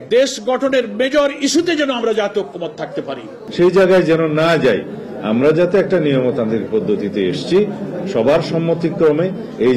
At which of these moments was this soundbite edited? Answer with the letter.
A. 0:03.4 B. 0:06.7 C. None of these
A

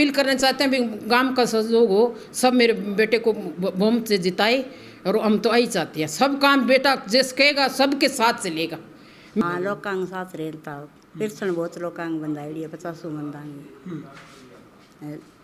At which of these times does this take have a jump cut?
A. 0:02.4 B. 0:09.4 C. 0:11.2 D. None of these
B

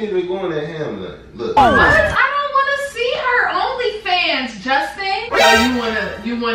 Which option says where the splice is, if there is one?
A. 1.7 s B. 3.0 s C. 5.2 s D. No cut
C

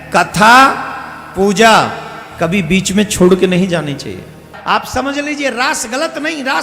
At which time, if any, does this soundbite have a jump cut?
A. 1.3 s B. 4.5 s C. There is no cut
B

